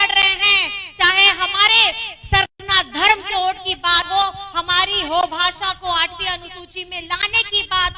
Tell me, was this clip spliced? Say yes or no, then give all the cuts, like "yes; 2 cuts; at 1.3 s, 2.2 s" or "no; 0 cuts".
no; 0 cuts